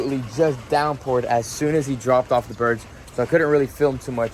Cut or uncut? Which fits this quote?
uncut